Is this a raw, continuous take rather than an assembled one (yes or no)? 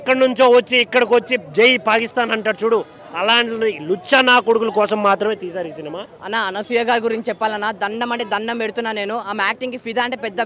no